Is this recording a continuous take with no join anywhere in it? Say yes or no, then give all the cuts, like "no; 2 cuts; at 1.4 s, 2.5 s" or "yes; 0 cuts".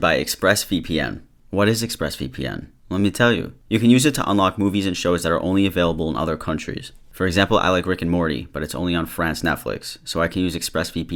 yes; 0 cuts